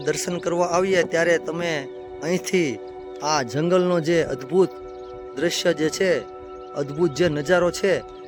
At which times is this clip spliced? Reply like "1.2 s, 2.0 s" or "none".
none